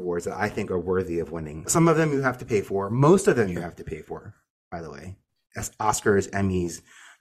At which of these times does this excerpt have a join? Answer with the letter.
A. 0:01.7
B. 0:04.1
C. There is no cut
A